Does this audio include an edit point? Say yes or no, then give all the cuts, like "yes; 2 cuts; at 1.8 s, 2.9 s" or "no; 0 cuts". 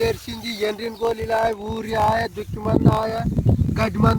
no; 0 cuts